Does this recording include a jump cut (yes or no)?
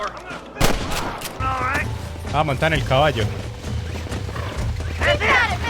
yes